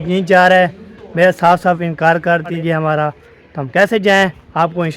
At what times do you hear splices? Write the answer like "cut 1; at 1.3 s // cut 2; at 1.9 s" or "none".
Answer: cut 1; at 2.5 s

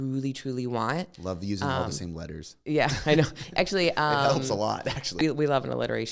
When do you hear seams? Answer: cut 1; at 5.1 s

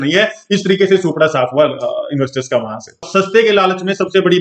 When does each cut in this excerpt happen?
cut 1; at 3.1 s

